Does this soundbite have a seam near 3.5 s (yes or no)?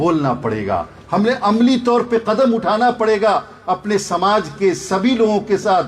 no